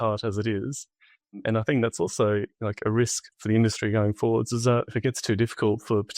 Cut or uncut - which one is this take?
cut